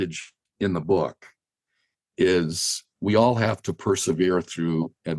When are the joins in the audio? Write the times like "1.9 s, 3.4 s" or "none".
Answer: 2.8 s